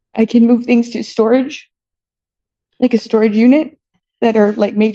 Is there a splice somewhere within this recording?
no; 0 cuts

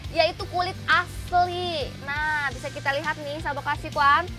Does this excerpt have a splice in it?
no; 0 cuts

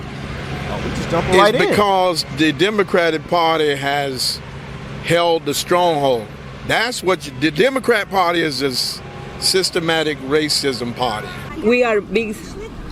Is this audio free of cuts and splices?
no; 1 cut; at 11.5 s

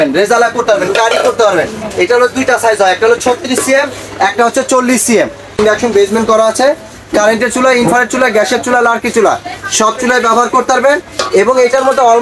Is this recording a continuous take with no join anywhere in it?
no; 1 cut; at 5.6 s

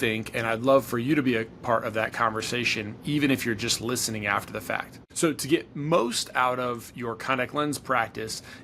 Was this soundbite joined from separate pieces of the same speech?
yes; 1 cut; at 5.0 s

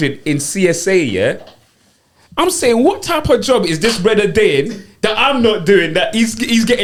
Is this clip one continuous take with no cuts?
yes; 0 cuts

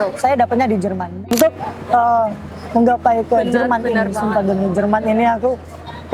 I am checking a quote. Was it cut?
yes; 1 cut; at 1.1 s

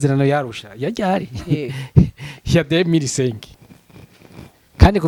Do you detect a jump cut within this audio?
no; 0 cuts

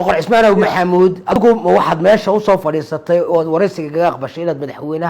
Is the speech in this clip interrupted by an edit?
yes; 1 cut; at 1.3 s

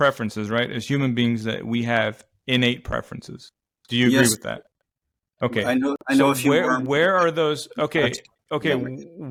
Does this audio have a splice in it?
no; 0 cuts

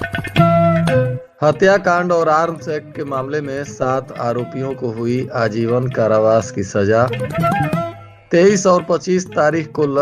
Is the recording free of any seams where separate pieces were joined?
no; 1 cut; at 1.2 s

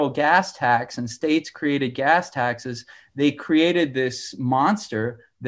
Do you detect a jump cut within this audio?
no; 0 cuts

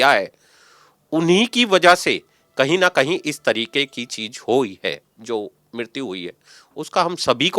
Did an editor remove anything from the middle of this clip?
no; 0 cuts

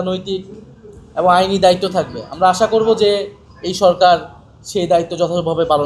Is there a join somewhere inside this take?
no; 0 cuts

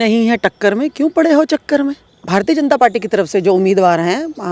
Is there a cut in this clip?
yes; 1 cut; at 2.1 s

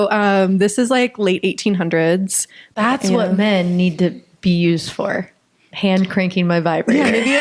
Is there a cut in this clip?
yes; 1 cut; at 2.7 s

